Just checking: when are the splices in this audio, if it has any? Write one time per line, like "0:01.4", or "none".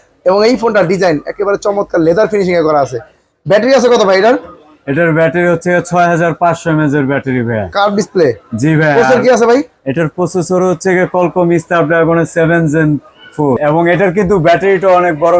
0:13.6